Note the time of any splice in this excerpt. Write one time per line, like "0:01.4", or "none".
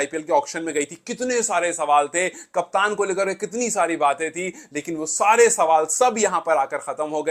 none